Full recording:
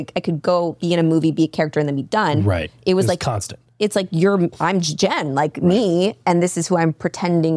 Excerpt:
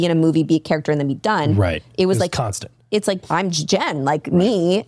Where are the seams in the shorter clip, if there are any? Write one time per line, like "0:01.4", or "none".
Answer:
0:03.2